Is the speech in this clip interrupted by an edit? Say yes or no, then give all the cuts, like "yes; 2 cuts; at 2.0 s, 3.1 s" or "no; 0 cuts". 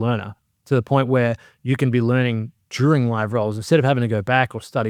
no; 0 cuts